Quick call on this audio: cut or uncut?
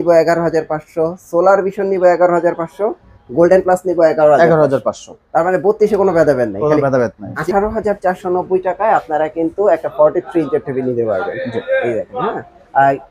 cut